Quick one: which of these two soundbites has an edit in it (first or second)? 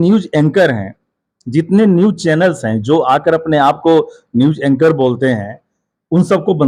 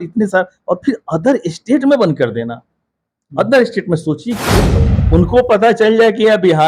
second